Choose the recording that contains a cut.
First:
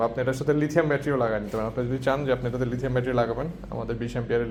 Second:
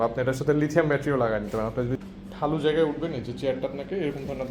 second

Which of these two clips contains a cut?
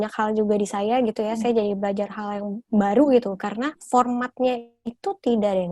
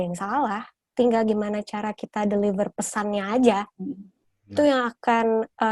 first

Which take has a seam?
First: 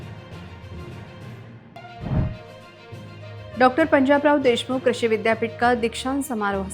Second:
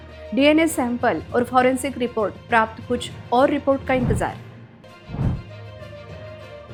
first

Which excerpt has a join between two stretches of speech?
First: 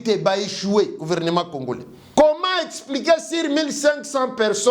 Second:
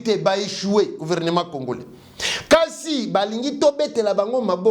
first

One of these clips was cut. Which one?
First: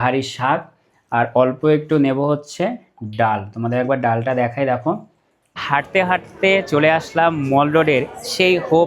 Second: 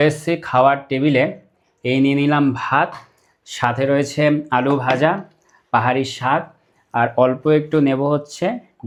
first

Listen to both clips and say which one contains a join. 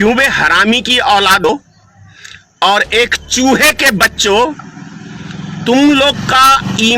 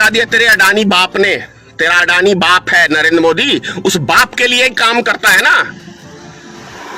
first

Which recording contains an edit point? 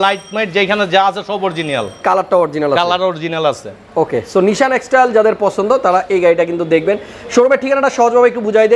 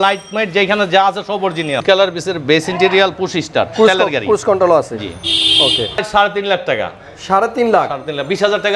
second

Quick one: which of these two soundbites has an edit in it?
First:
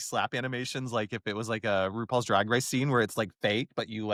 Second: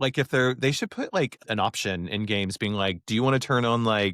second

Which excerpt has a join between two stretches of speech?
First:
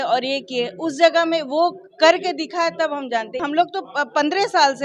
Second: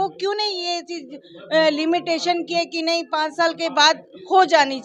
first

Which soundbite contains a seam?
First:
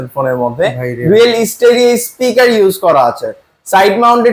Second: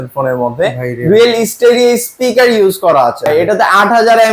second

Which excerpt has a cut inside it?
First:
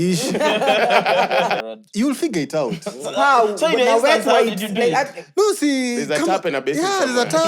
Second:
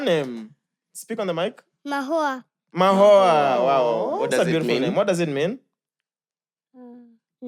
first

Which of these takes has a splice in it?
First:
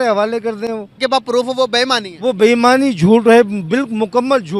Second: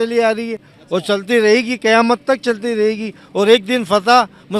first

